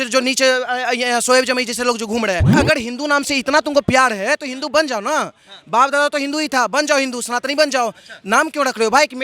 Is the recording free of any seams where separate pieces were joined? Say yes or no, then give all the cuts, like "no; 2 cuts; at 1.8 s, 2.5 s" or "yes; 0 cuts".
no; 1 cut; at 2.5 s